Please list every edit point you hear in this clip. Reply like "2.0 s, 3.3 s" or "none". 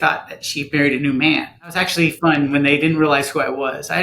1.8 s